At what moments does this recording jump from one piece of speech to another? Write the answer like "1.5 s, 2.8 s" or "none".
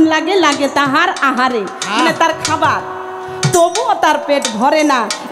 none